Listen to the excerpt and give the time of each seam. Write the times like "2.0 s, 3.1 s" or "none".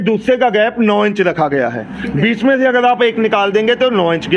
none